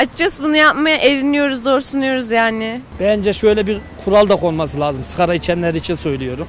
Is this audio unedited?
no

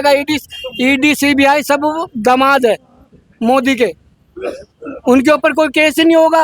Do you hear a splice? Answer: no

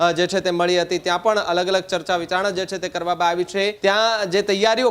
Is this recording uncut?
no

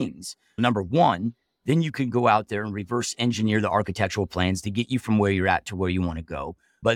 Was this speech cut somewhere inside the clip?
no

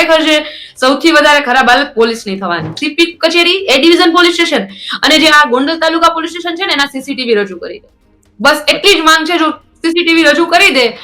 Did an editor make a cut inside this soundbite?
yes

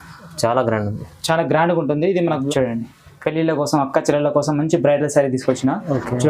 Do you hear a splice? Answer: yes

